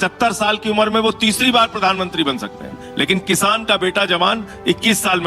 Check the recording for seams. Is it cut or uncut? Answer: uncut